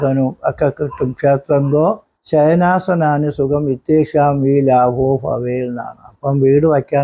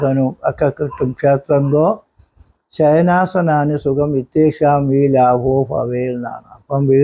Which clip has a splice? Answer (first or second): first